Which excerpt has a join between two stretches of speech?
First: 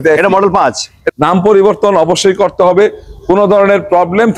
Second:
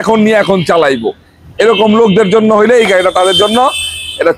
first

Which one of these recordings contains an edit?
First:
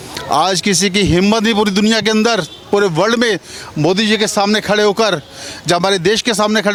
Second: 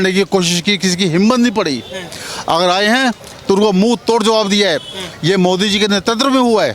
second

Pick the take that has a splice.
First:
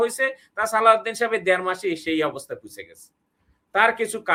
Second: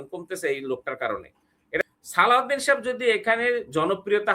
second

